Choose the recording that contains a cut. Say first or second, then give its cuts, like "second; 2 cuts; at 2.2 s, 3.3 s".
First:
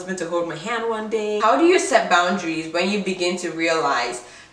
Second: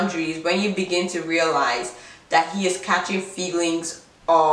first; 1 cut; at 1.4 s